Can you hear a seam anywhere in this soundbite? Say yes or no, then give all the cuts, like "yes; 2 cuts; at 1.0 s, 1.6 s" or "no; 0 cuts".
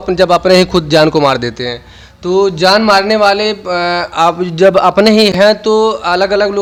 no; 0 cuts